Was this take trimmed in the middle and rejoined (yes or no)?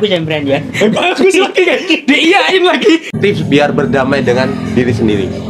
yes